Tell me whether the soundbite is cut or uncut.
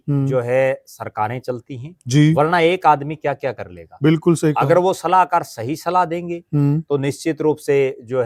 uncut